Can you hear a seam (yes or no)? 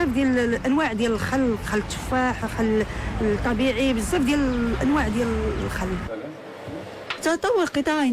no